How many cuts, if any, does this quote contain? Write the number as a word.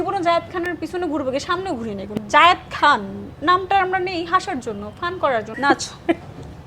two